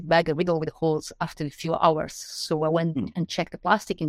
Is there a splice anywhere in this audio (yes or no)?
no